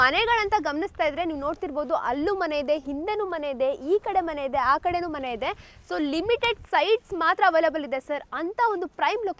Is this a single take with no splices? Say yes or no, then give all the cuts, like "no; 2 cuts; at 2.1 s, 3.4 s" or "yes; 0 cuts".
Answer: yes; 0 cuts